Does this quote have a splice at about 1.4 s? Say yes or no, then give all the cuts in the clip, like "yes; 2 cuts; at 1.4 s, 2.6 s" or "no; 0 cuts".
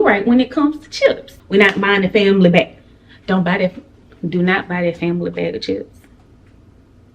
yes; 1 cut; at 1.4 s